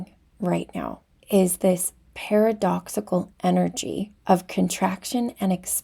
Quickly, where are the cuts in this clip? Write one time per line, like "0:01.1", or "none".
0:01.1
0:04.1